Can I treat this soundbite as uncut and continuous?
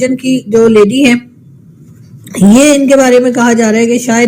yes; 0 cuts

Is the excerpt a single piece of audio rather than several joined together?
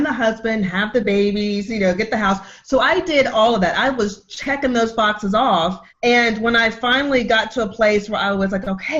no; 1 cut; at 5.9 s

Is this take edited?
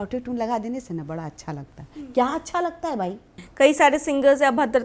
yes; 1 cut; at 3.4 s

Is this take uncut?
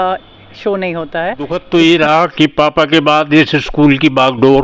no; 1 cut; at 1.6 s

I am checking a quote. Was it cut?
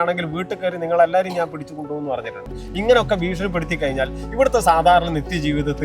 no; 0 cuts

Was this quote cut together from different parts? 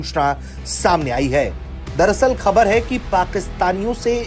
no; 0 cuts

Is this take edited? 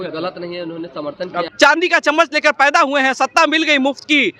yes; 1 cut; at 1.5 s

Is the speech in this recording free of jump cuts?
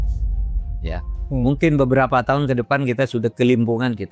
yes; 0 cuts

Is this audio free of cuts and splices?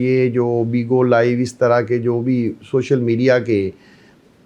yes; 0 cuts

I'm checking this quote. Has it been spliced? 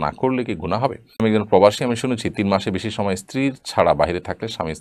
yes; 1 cut; at 1.2 s

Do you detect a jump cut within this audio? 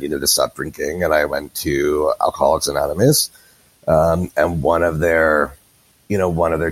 no; 0 cuts

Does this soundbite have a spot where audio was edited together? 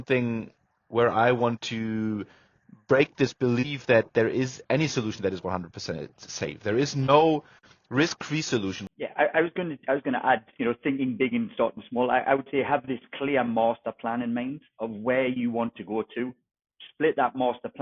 yes; 1 cut; at 8.8 s

